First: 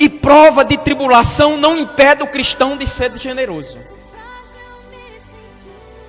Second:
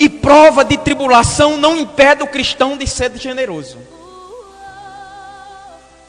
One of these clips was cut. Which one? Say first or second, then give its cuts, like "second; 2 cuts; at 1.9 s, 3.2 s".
second; 1 cut; at 3.9 s